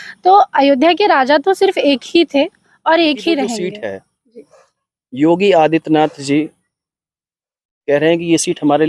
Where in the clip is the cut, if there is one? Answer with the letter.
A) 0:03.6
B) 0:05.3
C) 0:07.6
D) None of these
A